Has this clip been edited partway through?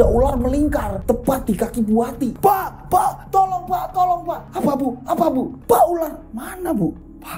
yes; 3 cuts; at 2.3 s, 4.4 s, 5.5 s

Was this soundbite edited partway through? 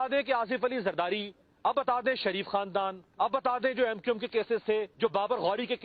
yes; 3 cuts; at 1.7 s, 3.3 s, 4.9 s

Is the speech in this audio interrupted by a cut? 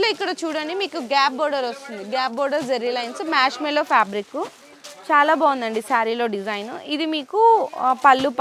no; 0 cuts

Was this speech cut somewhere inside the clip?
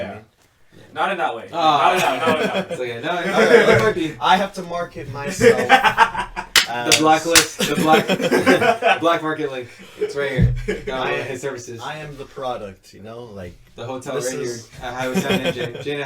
no; 0 cuts

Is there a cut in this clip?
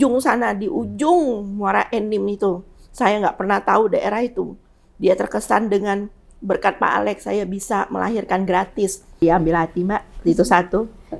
yes; 1 cut; at 9.2 s

